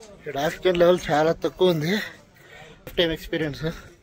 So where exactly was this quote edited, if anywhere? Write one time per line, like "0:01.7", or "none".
0:02.9